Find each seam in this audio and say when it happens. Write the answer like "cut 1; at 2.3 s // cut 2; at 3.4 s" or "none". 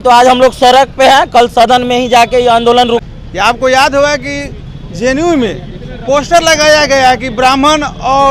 cut 1; at 3.0 s